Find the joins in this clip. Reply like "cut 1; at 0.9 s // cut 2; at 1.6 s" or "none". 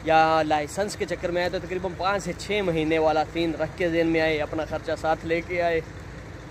none

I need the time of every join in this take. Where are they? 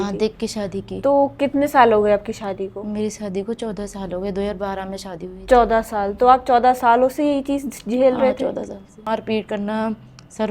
cut 1; at 9.1 s

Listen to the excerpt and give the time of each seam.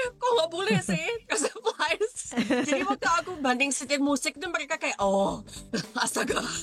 cut 1; at 5.5 s

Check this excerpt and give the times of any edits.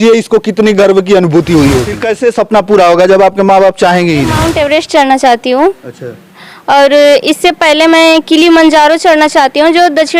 cut 1; at 2.1 s // cut 2; at 4.4 s

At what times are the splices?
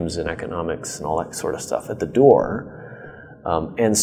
none

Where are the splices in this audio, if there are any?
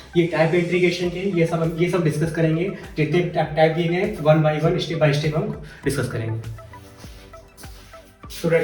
none

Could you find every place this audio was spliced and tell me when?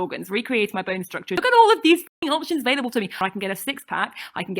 cut 1; at 1.4 s // cut 2; at 3.1 s

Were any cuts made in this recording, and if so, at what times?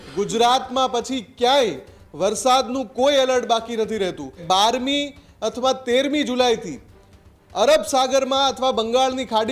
cut 1; at 4.4 s

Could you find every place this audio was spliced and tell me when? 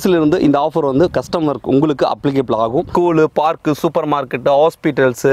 cut 1; at 2.9 s

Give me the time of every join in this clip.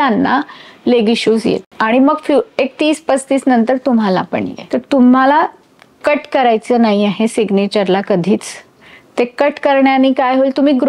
cut 1; at 1.7 s // cut 2; at 4.6 s

